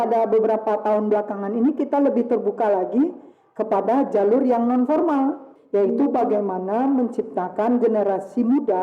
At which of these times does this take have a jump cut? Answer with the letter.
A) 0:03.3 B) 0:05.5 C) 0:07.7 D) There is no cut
B